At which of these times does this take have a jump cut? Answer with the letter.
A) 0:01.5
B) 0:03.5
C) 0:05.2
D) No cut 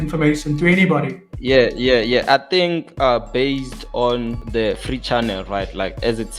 D